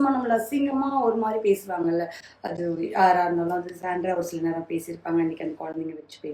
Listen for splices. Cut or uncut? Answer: uncut